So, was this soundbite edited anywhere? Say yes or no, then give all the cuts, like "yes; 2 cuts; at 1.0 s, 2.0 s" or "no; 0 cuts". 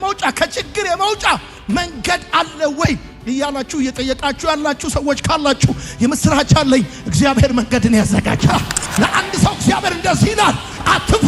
yes; 1 cut; at 8.4 s